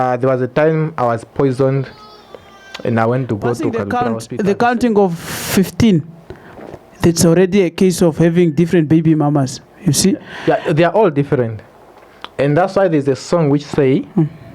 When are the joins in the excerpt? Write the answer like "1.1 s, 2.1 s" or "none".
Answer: 3.8 s